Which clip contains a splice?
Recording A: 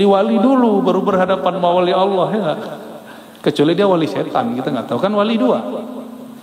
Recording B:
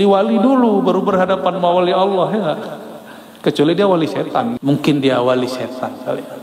B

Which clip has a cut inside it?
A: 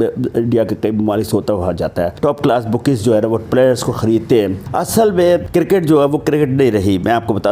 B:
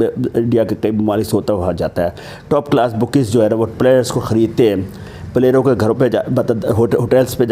A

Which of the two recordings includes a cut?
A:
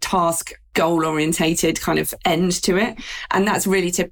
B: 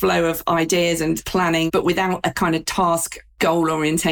B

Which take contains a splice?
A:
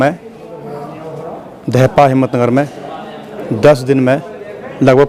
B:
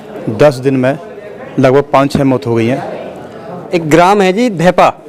B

